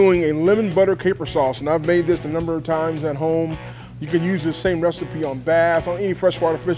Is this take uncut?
yes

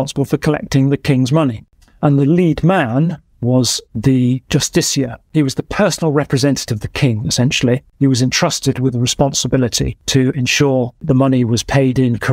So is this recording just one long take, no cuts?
no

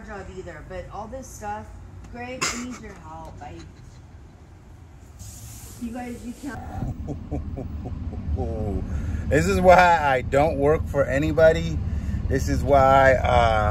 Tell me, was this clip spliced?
no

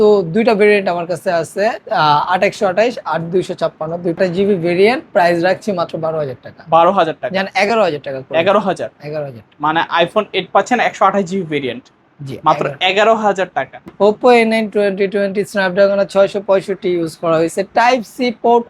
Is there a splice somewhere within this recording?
yes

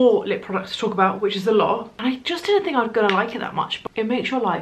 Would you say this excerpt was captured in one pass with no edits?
no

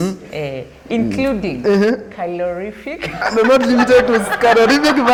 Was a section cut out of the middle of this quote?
no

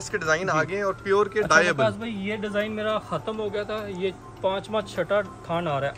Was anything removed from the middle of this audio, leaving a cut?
no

